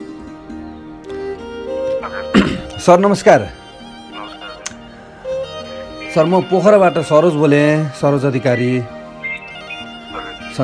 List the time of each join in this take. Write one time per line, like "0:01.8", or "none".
0:00.9
0:02.3
0:03.5
0:06.1

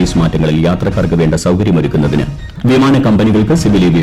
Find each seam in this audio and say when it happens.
0:02.4

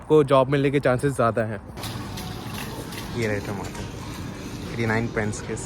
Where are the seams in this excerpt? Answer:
0:01.7

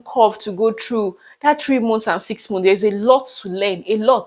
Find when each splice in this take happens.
none

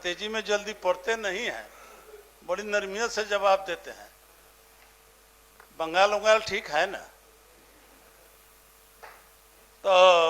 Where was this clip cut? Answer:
none

